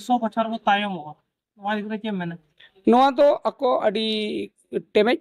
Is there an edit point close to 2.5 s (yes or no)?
no